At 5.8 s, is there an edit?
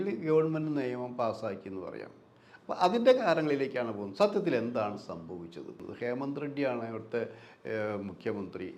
yes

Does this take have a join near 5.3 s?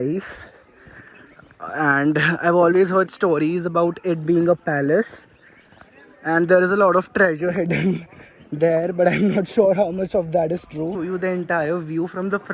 no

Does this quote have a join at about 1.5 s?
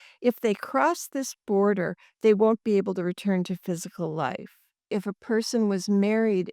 no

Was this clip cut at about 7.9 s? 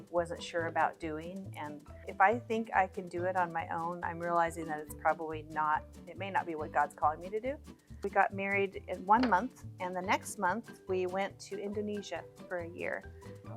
yes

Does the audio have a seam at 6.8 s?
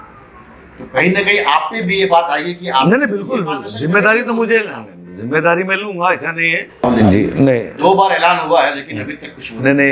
yes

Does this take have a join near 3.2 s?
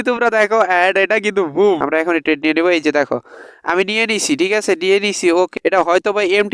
no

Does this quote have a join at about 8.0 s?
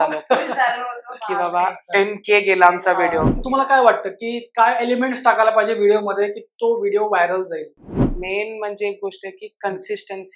yes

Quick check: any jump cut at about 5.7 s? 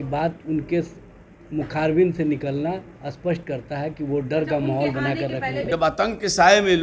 yes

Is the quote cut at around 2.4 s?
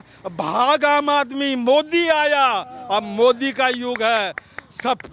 no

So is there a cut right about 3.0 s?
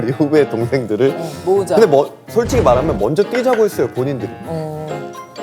no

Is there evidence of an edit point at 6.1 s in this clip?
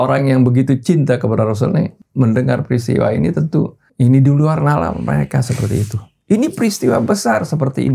no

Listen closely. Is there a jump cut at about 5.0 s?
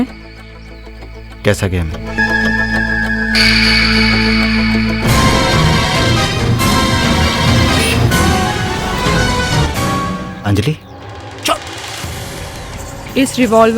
no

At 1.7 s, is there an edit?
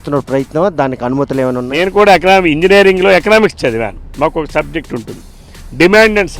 yes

